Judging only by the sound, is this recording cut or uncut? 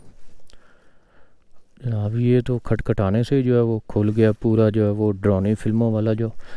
uncut